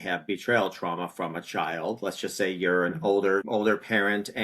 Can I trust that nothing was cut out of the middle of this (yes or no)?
no